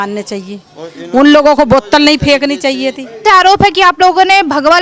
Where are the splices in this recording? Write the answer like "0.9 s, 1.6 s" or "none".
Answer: 3.2 s

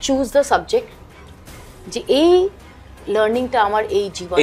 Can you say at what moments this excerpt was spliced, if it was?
none

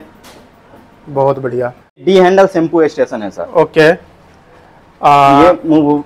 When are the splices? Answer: 2.0 s

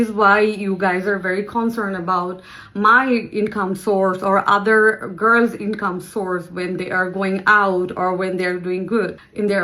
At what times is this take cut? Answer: none

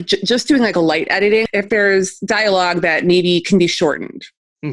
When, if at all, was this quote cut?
1.4 s

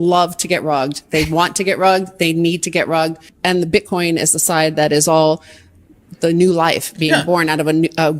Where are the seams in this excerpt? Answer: 3.3 s

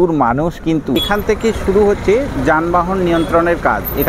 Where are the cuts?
1.0 s

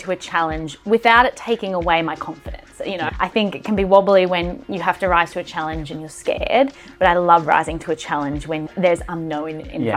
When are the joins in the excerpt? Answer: none

